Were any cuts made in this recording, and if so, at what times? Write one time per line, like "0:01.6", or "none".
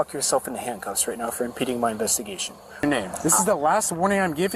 0:02.8